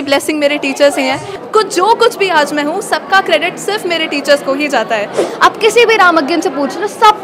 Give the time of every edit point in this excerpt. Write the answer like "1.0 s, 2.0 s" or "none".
1.3 s, 5.2 s